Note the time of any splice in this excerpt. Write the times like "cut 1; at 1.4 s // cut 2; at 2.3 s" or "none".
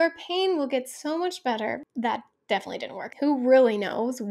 cut 1; at 1.8 s // cut 2; at 3.1 s